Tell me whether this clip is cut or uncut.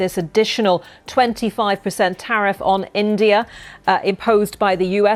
uncut